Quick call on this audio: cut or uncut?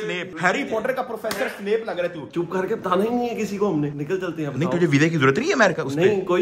cut